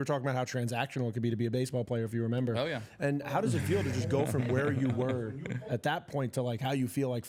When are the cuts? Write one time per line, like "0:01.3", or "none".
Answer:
none